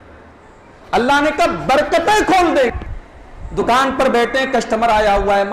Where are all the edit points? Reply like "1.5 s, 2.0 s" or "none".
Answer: 2.8 s